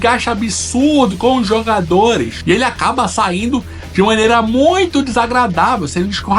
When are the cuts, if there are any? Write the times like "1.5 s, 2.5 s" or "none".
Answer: 2.3 s